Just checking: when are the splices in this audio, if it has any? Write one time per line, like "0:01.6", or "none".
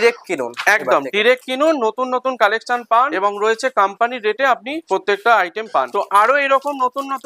0:03.1
0:04.7
0:05.9